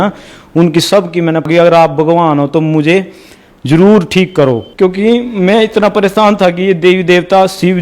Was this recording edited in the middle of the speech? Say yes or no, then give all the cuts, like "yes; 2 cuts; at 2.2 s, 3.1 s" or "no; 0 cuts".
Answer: yes; 2 cuts; at 1.5 s, 4.7 s